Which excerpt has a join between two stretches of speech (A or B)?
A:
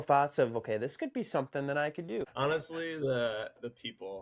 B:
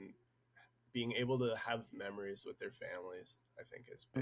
A